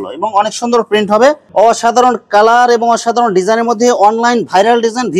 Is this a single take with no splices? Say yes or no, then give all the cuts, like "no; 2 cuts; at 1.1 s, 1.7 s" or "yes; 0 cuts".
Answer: no; 1 cut; at 1.4 s